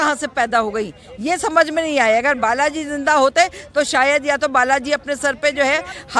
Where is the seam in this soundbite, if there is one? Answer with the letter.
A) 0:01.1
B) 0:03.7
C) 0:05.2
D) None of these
D